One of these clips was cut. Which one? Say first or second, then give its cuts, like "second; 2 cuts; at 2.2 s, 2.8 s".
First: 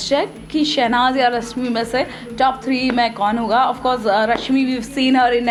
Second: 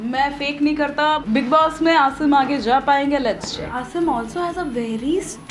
second; 2 cuts; at 1.2 s, 3.8 s